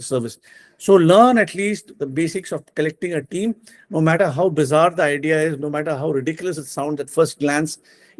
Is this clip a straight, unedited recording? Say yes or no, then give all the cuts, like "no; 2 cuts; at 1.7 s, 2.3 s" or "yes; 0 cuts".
yes; 0 cuts